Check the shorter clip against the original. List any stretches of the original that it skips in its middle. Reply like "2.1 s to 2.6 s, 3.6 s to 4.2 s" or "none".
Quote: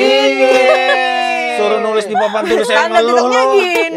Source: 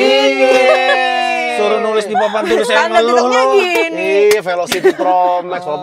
none